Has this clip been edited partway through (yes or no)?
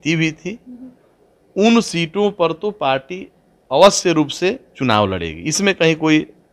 no